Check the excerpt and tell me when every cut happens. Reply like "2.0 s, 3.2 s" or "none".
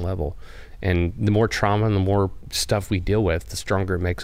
2.5 s